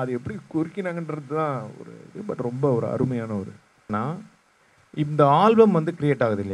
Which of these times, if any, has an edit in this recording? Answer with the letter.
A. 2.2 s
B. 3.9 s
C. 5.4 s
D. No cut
B